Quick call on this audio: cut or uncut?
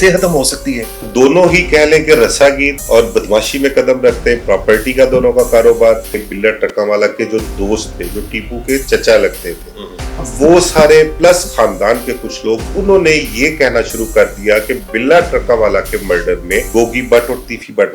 cut